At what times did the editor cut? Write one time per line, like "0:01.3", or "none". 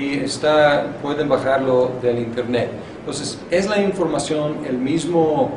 0:03.0